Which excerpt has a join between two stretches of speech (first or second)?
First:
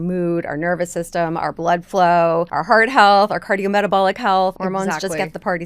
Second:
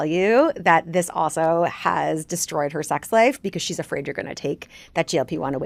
first